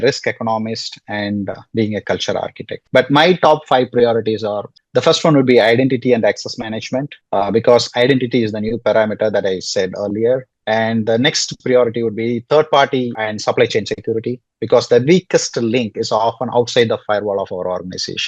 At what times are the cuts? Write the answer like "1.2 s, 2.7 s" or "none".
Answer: none